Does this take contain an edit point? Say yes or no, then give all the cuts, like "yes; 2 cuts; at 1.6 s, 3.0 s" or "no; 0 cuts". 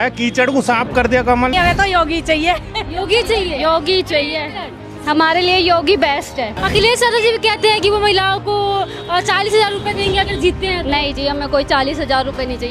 yes; 2 cuts; at 1.5 s, 6.6 s